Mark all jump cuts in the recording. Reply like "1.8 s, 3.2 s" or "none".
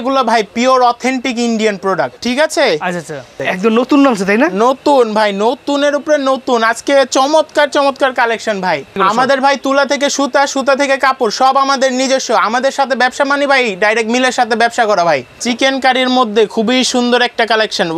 2.2 s, 3.4 s, 8.9 s, 15.3 s